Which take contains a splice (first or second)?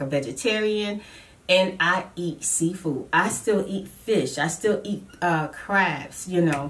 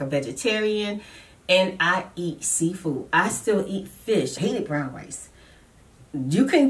second